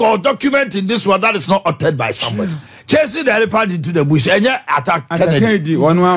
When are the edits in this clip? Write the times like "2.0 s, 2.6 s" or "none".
2.7 s